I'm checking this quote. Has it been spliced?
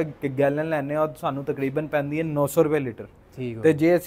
no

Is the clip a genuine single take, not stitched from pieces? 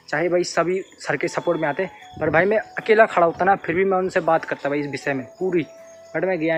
yes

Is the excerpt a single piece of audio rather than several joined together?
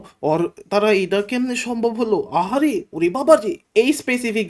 no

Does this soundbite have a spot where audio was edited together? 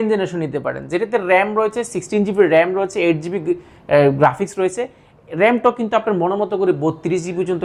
no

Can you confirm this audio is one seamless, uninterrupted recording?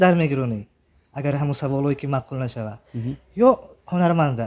yes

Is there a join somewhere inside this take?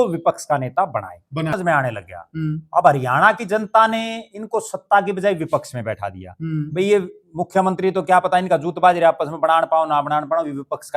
yes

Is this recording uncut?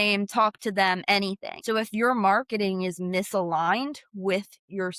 no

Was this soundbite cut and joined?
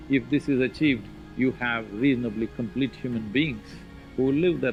no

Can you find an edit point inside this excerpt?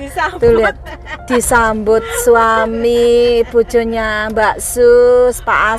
no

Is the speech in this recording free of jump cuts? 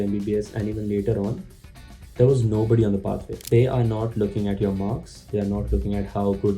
no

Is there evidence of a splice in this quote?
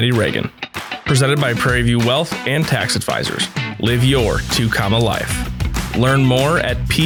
no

